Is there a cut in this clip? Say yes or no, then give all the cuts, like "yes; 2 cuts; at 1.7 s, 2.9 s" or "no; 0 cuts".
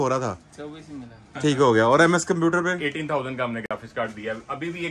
no; 0 cuts